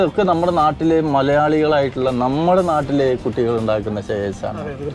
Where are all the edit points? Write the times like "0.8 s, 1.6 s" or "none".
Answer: none